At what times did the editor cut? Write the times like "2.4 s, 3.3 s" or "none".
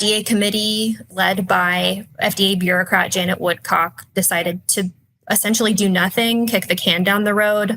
1.0 s, 2.0 s